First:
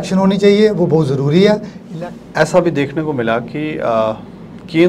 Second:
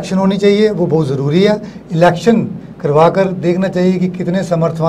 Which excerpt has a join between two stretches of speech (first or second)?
first